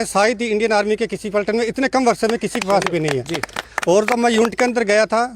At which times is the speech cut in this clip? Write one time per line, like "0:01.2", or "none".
none